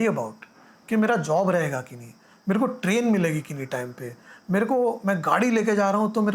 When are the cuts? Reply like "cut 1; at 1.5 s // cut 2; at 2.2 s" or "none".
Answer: none